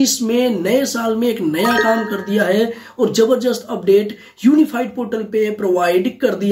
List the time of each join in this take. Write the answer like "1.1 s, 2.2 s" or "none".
none